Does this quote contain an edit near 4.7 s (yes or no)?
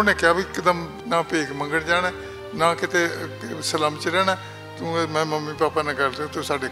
no